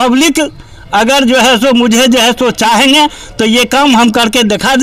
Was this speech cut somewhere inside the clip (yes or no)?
no